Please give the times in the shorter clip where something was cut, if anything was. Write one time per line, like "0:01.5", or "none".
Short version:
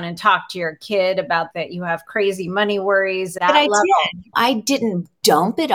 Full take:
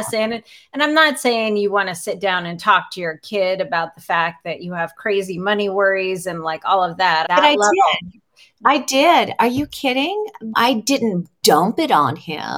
0:01.5
0:03.4
0:04.2